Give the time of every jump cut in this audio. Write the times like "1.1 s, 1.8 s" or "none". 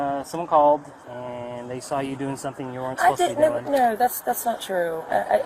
1.0 s